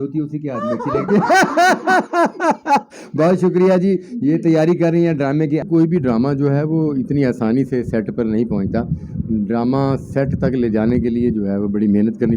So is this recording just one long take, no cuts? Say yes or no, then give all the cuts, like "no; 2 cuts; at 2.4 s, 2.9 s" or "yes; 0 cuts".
yes; 0 cuts